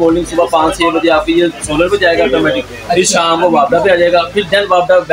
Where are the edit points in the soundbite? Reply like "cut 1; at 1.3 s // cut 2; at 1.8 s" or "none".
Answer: none